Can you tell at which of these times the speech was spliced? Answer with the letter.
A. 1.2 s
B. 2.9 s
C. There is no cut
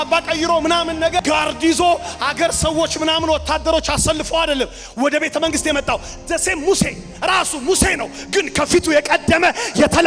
A